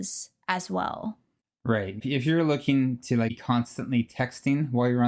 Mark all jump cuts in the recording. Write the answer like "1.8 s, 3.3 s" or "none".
2.0 s, 3.4 s